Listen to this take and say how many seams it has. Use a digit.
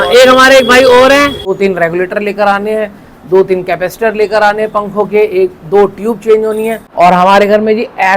2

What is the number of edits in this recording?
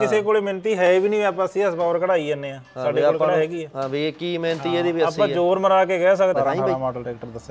1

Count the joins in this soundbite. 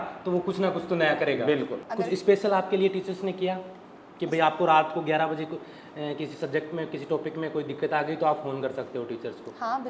1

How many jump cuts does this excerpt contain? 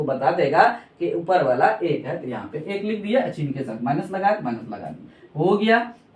0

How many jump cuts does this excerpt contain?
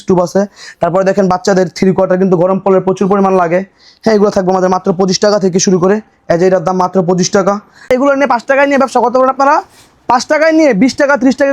1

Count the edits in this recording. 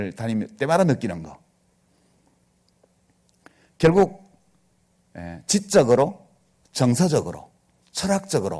0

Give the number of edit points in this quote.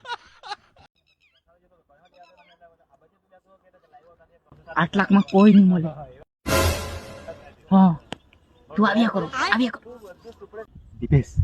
1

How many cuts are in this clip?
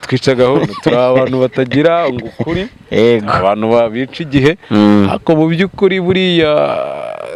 0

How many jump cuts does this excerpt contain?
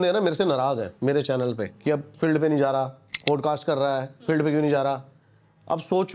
3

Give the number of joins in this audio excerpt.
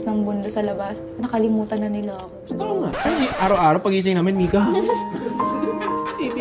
0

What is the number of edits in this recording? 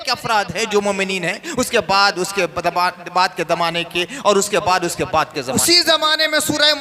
1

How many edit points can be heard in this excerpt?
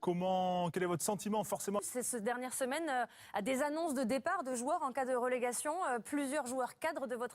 1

